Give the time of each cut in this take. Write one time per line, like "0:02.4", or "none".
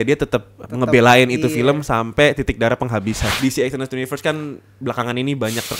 0:03.3

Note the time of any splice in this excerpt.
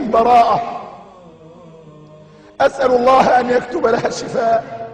none

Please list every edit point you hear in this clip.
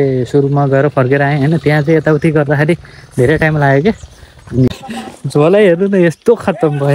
0:04.7

